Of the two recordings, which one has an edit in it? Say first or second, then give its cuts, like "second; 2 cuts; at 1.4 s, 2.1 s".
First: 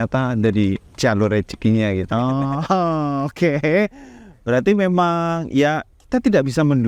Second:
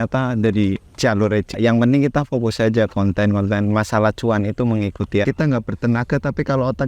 second; 2 cuts; at 1.5 s, 5.2 s